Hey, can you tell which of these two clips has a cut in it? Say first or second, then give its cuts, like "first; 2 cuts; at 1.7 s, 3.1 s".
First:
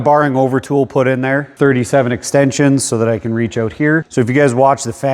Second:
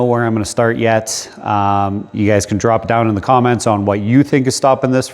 first; 2 cuts; at 1.5 s, 4.1 s